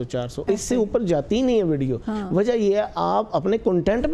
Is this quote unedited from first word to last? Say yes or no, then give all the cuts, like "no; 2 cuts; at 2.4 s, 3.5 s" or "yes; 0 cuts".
yes; 0 cuts